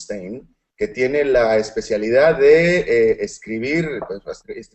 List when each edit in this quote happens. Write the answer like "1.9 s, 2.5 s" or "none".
1.7 s